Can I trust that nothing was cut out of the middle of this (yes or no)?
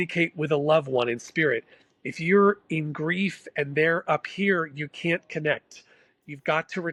yes